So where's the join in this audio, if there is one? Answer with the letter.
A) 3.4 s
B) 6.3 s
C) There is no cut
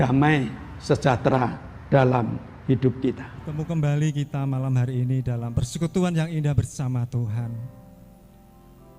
A